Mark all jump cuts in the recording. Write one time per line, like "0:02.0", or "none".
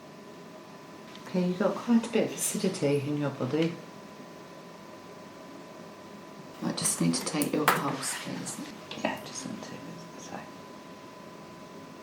0:01.1
0:06.5
0:08.7